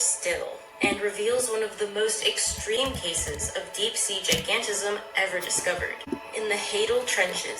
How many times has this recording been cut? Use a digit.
1